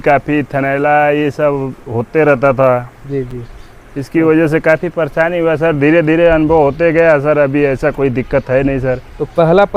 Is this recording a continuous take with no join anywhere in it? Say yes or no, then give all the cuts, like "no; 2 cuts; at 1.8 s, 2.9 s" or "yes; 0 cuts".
yes; 0 cuts